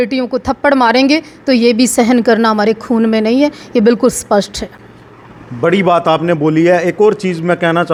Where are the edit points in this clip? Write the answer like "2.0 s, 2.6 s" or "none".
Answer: none

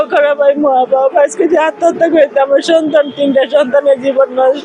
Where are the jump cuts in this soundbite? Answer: none

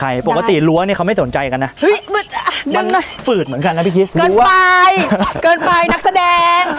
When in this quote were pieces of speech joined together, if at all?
none

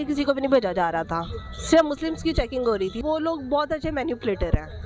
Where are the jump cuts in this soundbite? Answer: 2.9 s

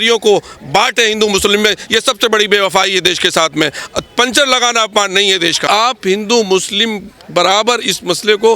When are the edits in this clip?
5.6 s

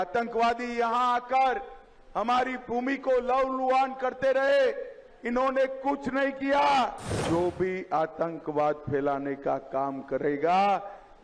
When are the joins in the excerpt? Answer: 7.1 s

